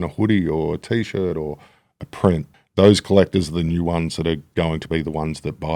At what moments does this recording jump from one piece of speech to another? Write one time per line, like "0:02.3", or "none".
0:02.5
0:04.5